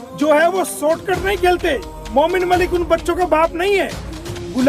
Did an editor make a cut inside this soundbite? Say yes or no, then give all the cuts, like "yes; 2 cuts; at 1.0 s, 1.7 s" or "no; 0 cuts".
yes; 1 cut; at 1.9 s